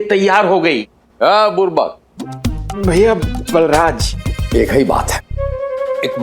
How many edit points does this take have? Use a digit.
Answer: 1